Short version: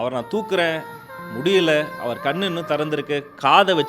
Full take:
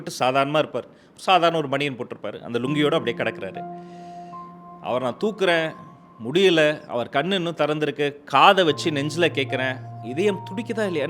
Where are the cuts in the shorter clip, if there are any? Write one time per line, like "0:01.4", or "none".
none